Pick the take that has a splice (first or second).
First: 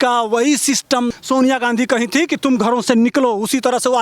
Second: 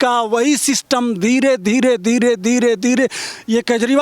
first